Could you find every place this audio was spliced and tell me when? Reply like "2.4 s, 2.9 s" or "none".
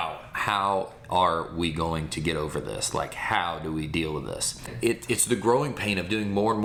none